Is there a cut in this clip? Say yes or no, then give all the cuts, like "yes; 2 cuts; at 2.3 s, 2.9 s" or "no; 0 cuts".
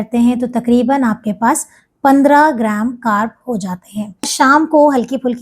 yes; 1 cut; at 4.3 s